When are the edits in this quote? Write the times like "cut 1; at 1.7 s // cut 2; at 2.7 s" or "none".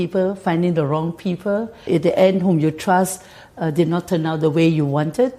cut 1; at 1.8 s